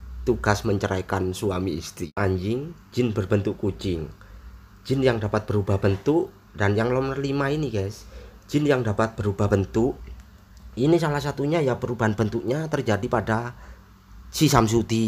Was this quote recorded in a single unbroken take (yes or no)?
no